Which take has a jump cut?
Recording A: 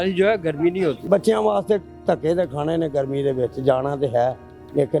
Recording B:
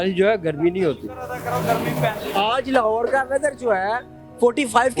A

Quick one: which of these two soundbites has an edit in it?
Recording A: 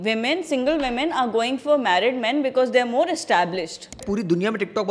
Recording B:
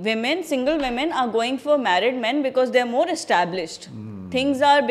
A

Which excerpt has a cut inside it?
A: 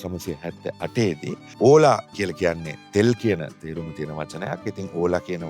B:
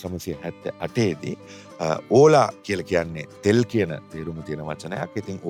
A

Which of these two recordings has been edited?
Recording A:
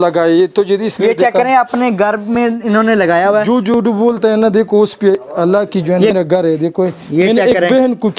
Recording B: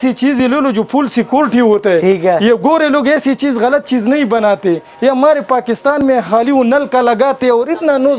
A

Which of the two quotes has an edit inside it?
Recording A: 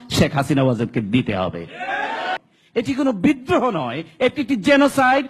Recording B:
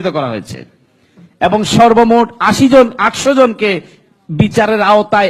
A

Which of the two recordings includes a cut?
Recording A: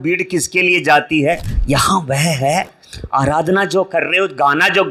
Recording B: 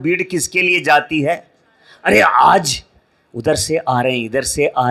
A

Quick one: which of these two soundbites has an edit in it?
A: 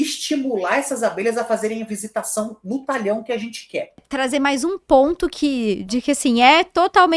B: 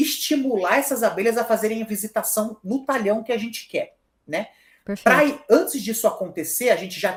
A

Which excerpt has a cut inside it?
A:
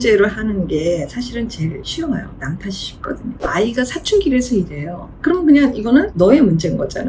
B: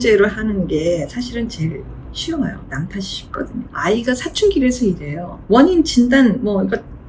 A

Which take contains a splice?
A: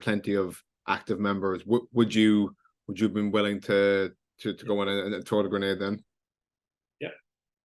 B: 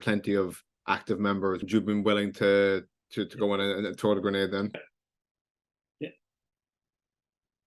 B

